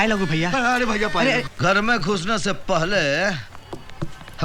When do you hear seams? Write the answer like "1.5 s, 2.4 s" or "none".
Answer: 1.5 s